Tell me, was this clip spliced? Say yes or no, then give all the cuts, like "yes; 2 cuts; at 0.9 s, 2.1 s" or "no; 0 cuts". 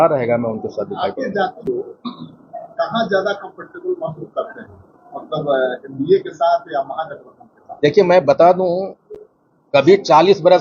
no; 0 cuts